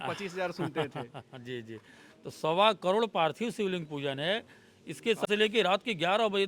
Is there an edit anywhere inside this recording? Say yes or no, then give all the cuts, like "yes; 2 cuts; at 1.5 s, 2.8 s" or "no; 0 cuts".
yes; 1 cut; at 5.2 s